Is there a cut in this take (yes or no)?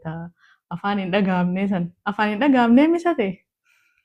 no